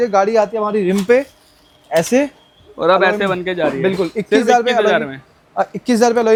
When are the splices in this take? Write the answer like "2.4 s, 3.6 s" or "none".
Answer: none